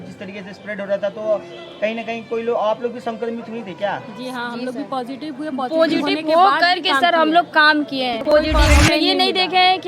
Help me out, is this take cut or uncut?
cut